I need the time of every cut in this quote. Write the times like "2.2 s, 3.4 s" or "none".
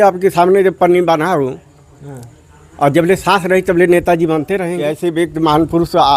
4.8 s

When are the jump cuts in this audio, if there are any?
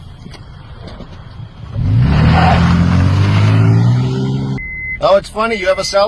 5.0 s

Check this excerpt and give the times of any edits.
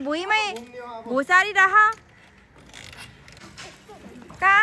3.4 s

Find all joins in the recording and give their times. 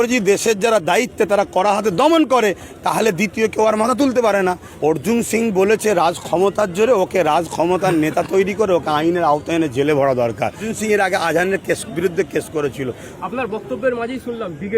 4.7 s, 10.7 s, 13.1 s

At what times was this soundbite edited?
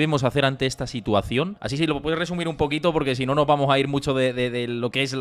none

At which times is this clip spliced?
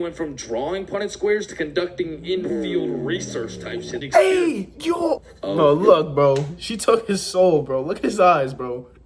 4.0 s, 5.3 s

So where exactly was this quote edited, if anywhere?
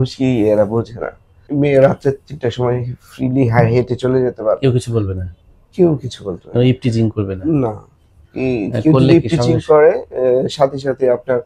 1.4 s

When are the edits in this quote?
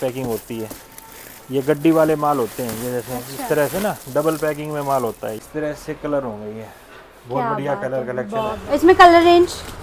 5.5 s, 8.6 s

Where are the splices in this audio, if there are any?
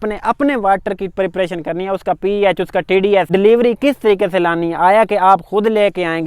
3.3 s

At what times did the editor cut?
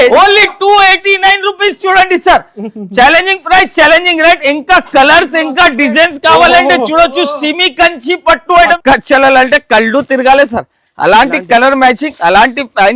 8.8 s

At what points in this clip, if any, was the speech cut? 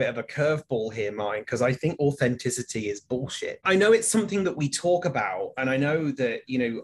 3.6 s

